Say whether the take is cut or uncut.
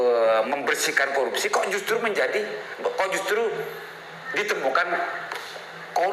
uncut